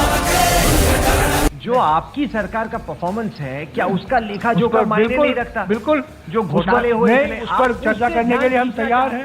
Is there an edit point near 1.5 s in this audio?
yes; 1 cut; at 1.5 s

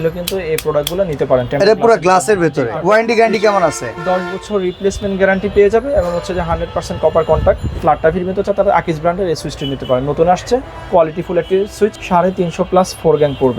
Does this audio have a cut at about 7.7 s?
yes; 3 cuts; at 2.8 s, 7.7 s, 12.0 s

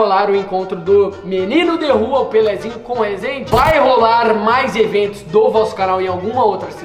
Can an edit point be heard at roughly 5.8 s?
no; 1 cut; at 3.4 s

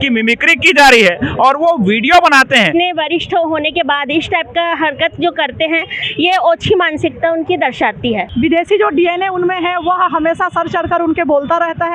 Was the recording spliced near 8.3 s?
yes; 2 cuts; at 2.7 s, 8.3 s

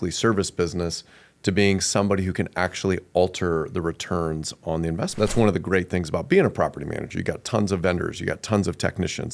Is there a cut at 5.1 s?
yes; 1 cut; at 5.1 s

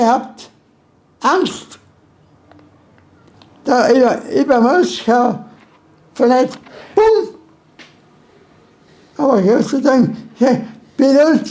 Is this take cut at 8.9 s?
yes; 2 cuts; at 3.3 s, 8.9 s

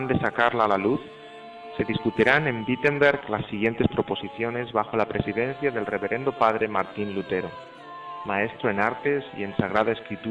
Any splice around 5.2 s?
no; 1 cut; at 8.6 s

